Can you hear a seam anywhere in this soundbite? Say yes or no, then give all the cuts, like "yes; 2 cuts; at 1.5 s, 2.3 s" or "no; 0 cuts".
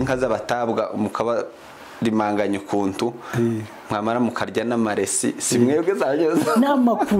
no; 0 cuts